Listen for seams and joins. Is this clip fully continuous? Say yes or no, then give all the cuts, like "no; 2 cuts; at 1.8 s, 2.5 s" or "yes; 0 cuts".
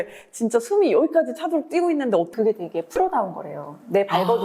no; 1 cut; at 2.3 s